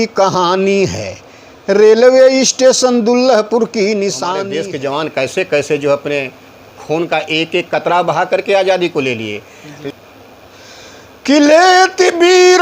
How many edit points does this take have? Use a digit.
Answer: 2